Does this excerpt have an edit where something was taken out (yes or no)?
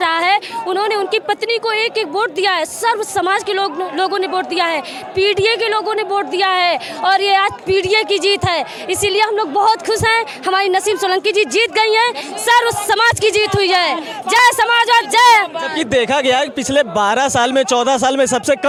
no